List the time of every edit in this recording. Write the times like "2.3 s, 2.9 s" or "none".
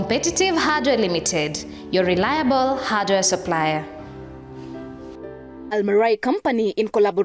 5.7 s